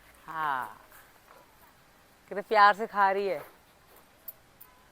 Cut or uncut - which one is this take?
uncut